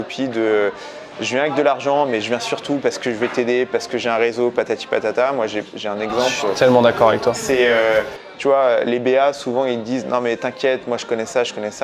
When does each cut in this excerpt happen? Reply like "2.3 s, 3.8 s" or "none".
none